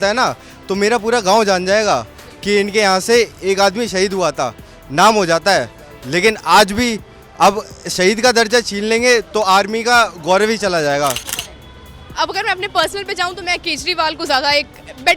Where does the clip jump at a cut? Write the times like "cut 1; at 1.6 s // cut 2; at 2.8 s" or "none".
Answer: cut 1; at 11.2 s